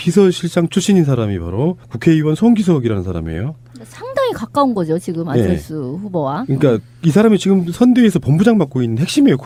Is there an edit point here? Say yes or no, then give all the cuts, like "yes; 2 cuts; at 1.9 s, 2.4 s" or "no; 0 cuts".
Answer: no; 0 cuts